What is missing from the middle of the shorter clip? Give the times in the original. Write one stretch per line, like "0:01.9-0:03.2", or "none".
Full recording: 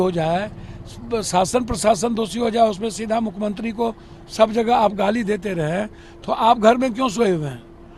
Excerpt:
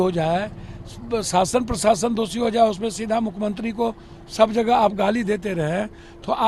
none